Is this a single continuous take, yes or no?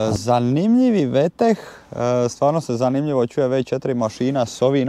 yes